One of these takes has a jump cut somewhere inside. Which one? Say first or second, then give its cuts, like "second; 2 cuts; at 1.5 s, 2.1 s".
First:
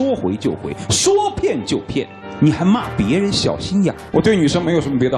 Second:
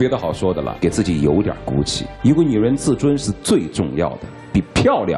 first; 1 cut; at 4.0 s